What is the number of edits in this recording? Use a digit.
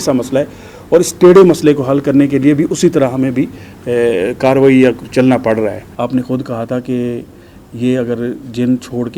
1